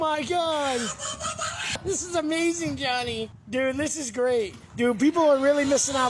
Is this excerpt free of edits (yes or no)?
no